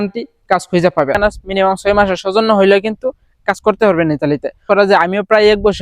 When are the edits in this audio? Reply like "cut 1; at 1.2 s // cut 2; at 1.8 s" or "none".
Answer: cut 1; at 1.2 s // cut 2; at 4.6 s